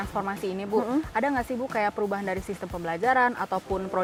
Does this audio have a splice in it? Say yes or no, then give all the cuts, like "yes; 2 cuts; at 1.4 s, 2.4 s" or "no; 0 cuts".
no; 0 cuts